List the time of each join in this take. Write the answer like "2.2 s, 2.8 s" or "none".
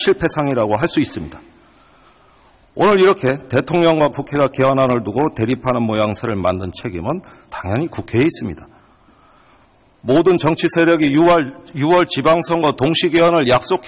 none